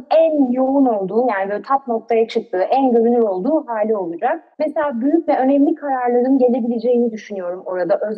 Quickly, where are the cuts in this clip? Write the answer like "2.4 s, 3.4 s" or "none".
4.5 s